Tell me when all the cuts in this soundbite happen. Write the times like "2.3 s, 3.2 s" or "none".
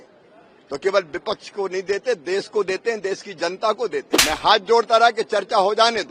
4.1 s